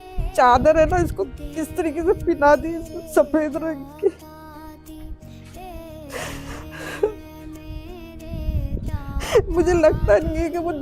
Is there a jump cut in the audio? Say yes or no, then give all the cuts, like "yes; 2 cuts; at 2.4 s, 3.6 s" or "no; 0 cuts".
no; 0 cuts